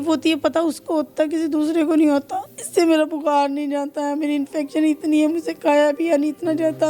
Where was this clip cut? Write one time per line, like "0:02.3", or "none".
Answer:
0:02.6

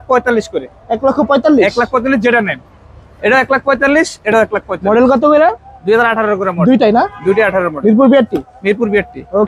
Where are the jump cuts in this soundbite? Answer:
none

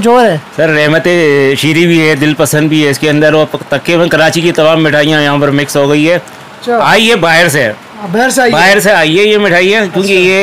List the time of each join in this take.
none

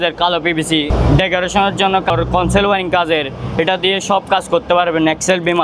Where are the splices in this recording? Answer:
0:00.9
0:02.1

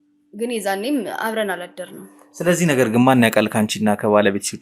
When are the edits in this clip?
none

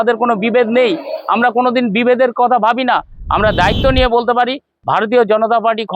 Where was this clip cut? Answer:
0:03.1

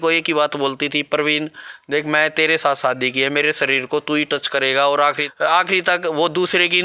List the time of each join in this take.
0:05.2

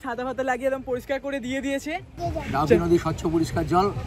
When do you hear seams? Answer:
0:02.2

